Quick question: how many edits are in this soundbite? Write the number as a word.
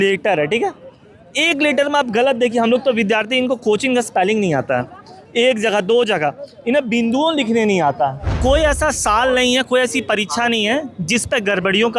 one